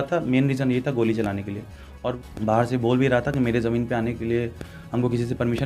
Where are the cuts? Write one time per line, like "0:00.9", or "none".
0:02.2